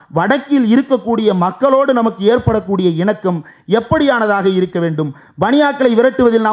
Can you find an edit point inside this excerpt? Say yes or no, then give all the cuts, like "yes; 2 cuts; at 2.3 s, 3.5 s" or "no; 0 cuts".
no; 0 cuts